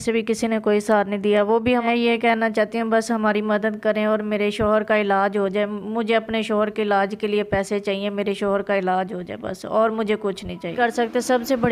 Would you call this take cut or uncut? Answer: cut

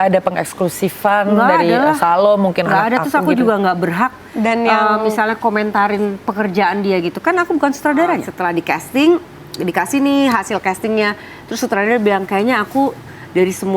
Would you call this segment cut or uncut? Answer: cut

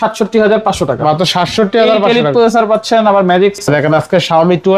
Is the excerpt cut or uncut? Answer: cut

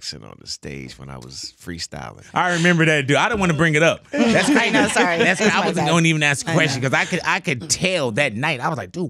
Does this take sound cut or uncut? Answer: cut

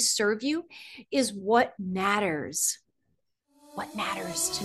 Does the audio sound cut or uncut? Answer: uncut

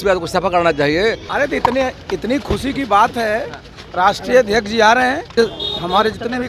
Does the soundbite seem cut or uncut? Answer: cut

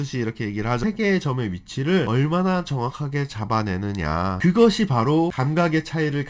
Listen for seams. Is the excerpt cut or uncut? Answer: uncut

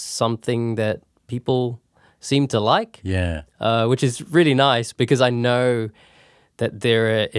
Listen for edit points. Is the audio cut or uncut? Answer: uncut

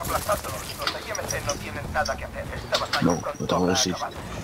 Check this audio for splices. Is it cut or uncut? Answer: uncut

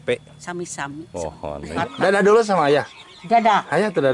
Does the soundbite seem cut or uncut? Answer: cut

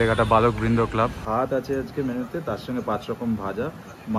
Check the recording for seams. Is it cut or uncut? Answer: cut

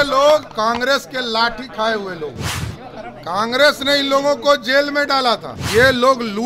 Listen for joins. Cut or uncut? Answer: cut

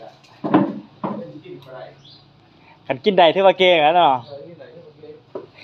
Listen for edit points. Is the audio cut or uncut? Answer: uncut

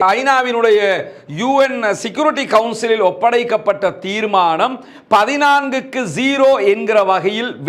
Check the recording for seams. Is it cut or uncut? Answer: uncut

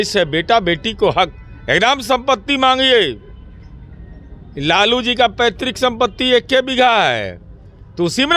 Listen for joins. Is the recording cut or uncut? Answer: uncut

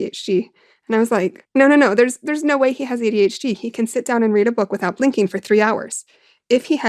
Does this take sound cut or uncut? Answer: uncut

